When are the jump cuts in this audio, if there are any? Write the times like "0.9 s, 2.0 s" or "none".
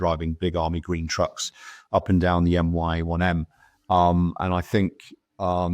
none